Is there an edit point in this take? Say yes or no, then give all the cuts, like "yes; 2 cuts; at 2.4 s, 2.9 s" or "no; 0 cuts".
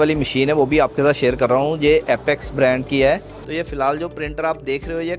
yes; 1 cut; at 3.4 s